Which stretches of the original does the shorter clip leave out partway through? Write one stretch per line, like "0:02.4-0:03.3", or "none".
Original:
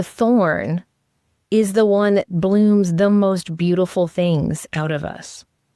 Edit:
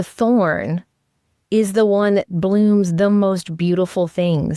none

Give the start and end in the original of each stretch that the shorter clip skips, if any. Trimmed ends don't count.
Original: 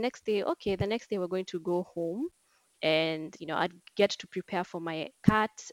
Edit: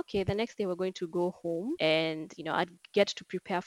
0:02.3-0:02.8

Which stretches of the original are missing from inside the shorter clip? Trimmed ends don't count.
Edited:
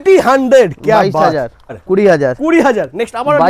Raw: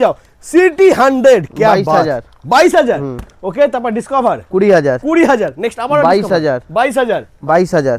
0:02.5-0:04.4

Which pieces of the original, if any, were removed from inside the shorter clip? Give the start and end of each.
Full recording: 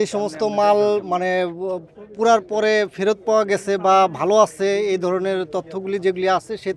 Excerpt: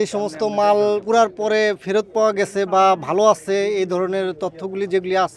0:01.0-0:02.1

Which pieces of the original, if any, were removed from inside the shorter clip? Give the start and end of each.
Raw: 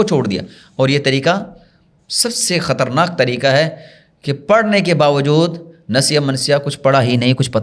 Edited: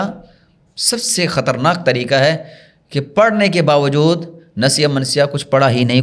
none

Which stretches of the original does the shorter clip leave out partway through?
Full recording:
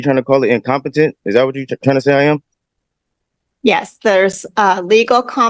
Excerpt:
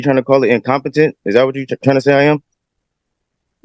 none

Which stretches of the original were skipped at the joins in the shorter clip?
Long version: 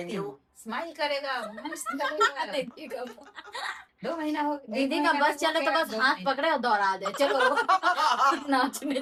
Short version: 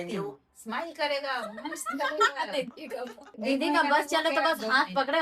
0:03.3-0:04.6

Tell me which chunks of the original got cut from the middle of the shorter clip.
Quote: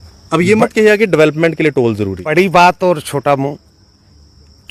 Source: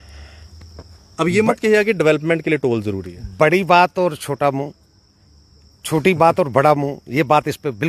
0:03.1-0:03.4

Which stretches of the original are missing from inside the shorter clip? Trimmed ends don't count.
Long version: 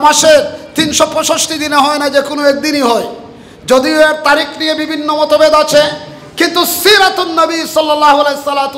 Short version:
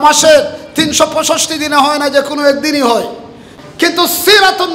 0:03.5-0:06.1

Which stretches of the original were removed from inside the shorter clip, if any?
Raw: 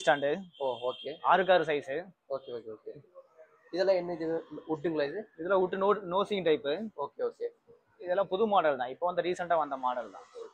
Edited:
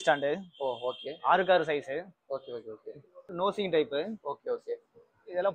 0:03.3-0:06.0

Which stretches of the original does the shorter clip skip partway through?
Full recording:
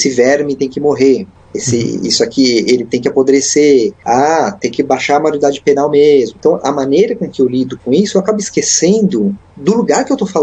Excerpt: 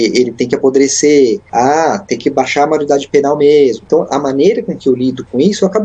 none

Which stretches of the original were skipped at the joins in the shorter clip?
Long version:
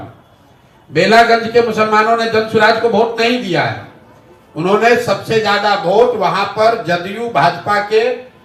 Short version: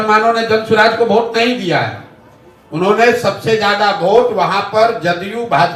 none

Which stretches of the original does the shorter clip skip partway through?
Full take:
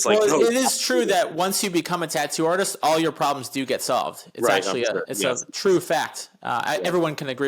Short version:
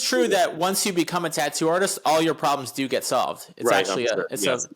none

